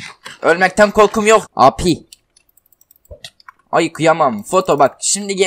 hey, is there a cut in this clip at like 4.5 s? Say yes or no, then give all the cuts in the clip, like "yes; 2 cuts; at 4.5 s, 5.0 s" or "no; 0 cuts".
no; 1 cut; at 1.5 s